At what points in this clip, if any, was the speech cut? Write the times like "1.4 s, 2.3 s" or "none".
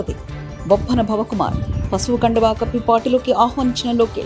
none